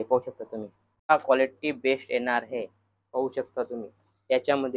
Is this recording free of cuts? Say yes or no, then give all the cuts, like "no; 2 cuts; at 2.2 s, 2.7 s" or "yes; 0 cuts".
no; 1 cut; at 1.1 s